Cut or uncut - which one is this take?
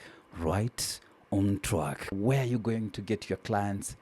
cut